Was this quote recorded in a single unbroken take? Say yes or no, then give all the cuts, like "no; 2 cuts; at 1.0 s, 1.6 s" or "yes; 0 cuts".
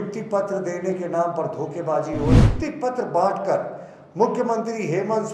no; 1 cut; at 2.5 s